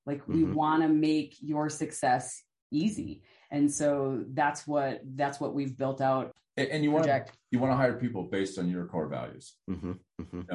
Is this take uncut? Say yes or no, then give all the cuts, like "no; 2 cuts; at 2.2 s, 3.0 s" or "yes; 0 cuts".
no; 1 cut; at 6.3 s